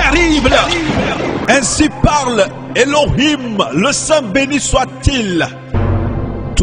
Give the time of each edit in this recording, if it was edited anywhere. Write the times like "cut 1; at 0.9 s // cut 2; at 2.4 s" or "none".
cut 1; at 1.4 s